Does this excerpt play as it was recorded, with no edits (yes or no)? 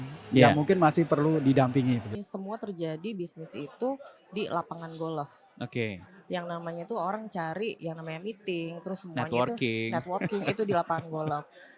no